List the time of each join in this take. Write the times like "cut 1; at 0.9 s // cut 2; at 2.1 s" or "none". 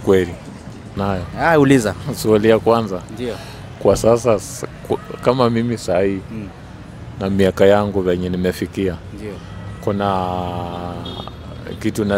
cut 1; at 1.0 s

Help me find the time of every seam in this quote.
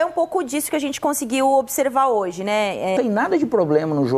cut 1; at 2.9 s

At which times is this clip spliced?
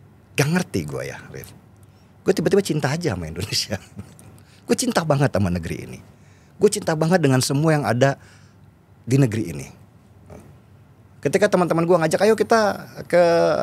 none

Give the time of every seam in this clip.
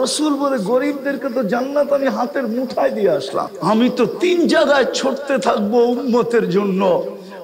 cut 1; at 3.5 s

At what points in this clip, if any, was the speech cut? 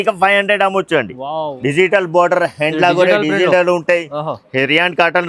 cut 1; at 1.5 s

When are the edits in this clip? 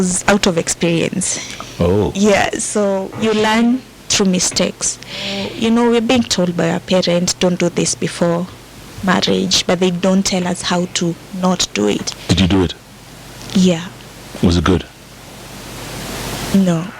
cut 1; at 3.1 s // cut 2; at 5.5 s // cut 3; at 12.1 s

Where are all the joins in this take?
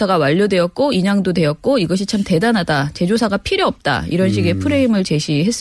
cut 1; at 2.5 s

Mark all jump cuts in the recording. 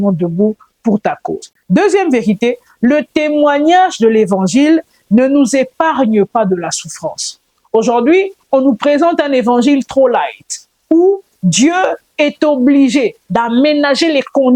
none

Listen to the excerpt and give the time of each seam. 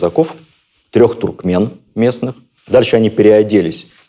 cut 1; at 2.5 s

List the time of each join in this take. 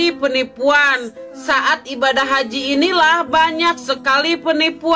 none

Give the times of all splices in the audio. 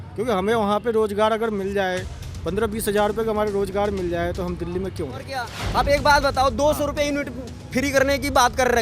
cut 1; at 5.6 s

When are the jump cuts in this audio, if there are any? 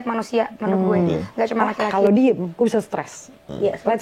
cut 1; at 1.9 s

